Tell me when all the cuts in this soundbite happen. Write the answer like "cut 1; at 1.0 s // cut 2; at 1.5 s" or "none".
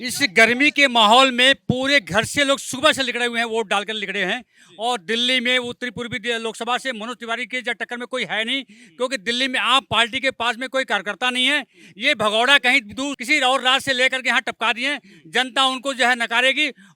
cut 1; at 13.2 s